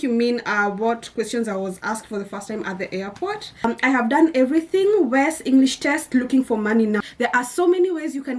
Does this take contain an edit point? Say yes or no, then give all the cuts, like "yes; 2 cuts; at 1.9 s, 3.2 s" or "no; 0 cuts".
yes; 2 cuts; at 3.6 s, 7.0 s